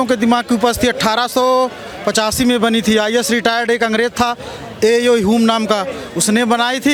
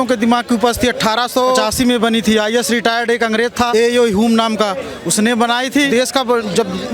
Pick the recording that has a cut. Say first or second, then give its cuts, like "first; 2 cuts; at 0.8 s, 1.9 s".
second; 3 cuts; at 1.6 s, 3.7 s, 5.9 s